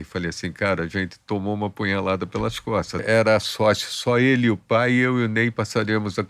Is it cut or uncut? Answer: cut